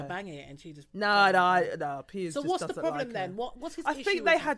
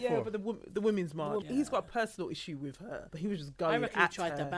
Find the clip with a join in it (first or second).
second